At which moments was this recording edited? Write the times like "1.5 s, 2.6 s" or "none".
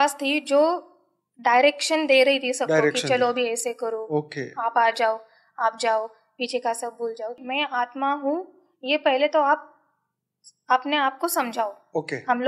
7.4 s